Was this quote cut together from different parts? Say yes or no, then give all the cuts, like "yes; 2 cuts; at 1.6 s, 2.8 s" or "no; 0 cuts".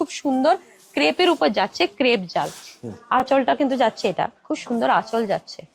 no; 0 cuts